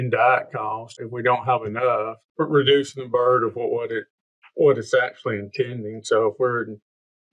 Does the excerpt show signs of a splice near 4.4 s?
no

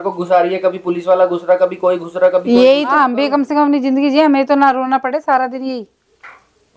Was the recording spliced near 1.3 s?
no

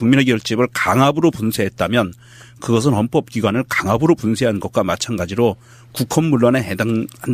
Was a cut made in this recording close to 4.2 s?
yes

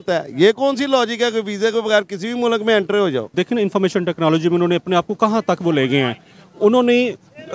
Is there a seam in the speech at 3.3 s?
yes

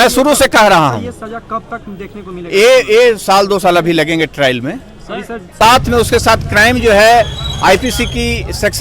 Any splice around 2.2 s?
no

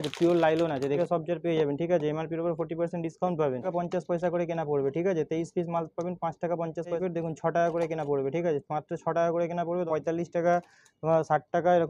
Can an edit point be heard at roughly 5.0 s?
no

